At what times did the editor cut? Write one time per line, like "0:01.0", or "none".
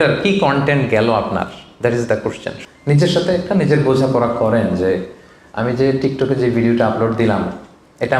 0:02.5